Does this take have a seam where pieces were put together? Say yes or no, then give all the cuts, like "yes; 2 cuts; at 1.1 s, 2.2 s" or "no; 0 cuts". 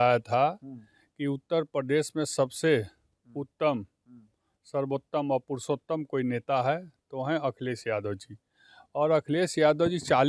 no; 0 cuts